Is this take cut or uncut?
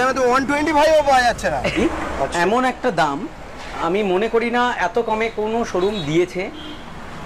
cut